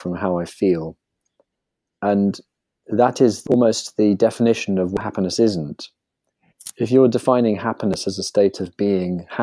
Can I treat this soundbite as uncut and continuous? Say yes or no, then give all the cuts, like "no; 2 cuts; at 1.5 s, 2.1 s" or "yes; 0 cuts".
yes; 0 cuts